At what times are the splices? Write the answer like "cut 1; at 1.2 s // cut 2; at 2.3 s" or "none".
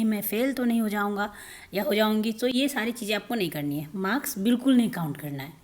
none